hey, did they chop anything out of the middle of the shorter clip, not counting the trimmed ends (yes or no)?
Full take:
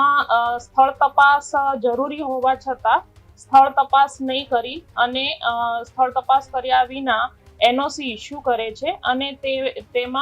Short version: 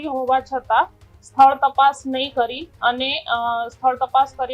no